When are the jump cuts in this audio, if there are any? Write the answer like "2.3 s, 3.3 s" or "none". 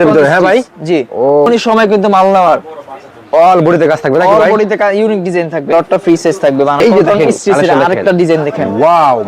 1.5 s, 5.7 s, 6.8 s